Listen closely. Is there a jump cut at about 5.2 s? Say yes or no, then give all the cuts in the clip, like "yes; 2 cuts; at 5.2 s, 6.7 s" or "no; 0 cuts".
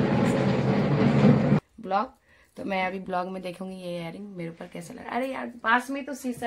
no; 1 cut; at 1.6 s